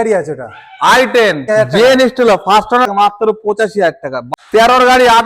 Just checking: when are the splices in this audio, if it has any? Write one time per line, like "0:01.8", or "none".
0:01.4
0:02.9
0:04.2